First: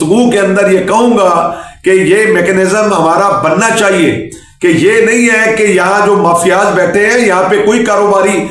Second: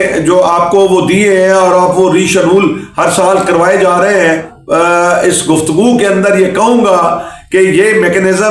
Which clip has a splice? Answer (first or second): second